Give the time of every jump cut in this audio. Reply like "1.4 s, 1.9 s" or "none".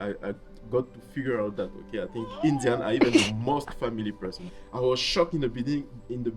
4.5 s